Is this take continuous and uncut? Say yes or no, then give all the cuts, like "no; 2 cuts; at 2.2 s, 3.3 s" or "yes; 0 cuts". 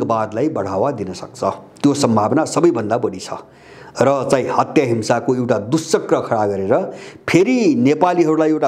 yes; 0 cuts